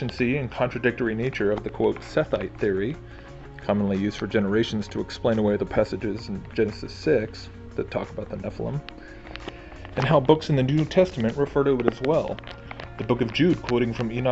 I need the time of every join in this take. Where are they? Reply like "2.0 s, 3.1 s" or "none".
6.2 s